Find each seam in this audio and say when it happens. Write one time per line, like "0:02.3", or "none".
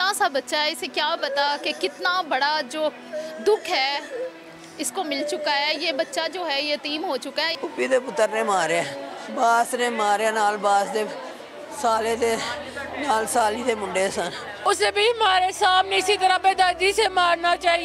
0:07.5
0:14.5